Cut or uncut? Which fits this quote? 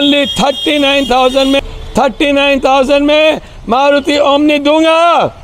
cut